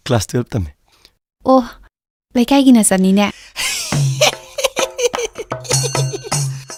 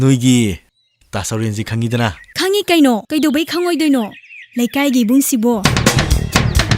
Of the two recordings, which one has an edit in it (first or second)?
second